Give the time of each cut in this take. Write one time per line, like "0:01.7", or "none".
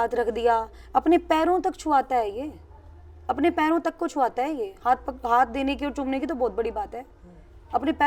none

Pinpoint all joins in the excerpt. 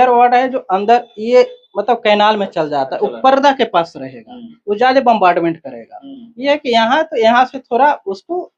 none

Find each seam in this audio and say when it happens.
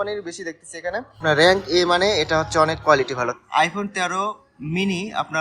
0:01.2
0:03.3

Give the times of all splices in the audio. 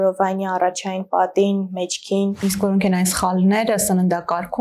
0:02.4

